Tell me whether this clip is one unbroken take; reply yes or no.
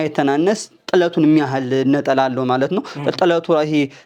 yes